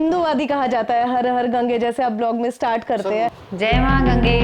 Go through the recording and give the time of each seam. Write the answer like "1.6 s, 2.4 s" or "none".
3.4 s